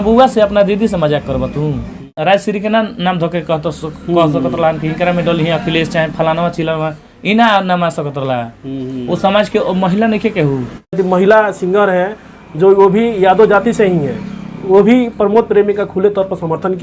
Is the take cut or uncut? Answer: cut